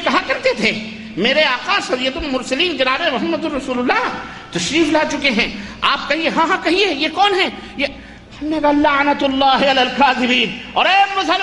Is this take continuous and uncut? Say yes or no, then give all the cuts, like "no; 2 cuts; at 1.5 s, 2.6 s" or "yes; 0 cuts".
yes; 0 cuts